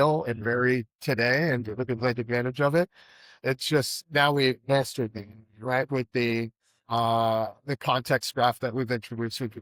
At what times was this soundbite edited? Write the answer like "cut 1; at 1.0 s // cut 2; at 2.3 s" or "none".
none